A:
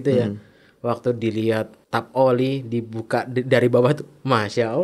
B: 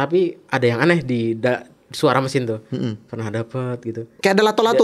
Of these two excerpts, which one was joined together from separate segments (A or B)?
A